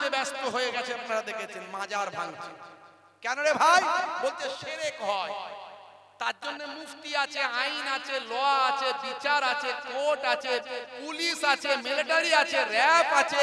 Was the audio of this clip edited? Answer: no; 0 cuts

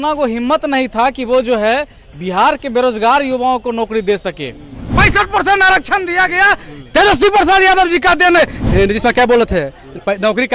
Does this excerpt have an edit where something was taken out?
yes; 2 cuts; at 4.9 s, 8.6 s

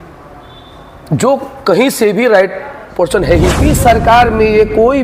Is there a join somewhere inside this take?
yes; 1 cut; at 3.6 s

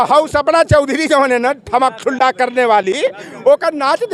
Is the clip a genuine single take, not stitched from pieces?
yes; 0 cuts

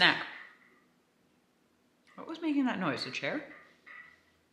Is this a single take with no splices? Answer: yes; 0 cuts

